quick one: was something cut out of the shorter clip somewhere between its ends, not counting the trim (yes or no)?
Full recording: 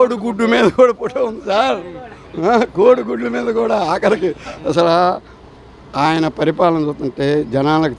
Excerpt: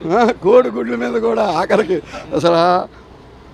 no